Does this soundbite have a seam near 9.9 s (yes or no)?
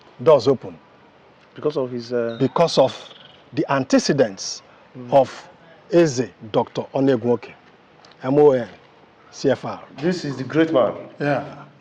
yes